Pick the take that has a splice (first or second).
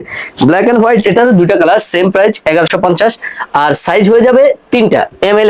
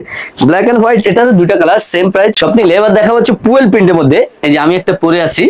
second